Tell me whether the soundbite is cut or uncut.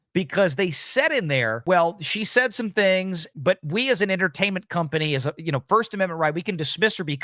cut